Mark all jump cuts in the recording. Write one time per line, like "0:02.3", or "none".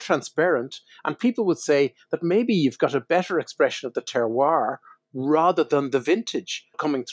none